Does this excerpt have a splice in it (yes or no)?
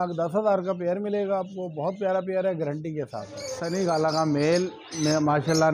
yes